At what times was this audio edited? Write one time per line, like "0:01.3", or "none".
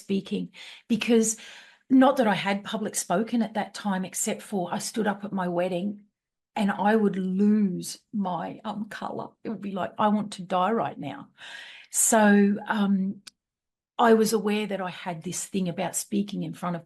none